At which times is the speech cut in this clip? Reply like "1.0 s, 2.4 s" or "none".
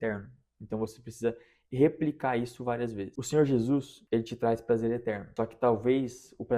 3.9 s, 5.2 s